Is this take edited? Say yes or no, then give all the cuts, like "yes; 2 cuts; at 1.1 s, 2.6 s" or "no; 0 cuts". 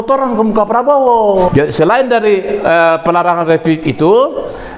yes; 1 cut; at 1.5 s